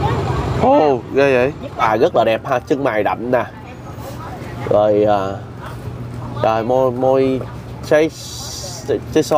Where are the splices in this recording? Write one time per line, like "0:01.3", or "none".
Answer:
0:01.8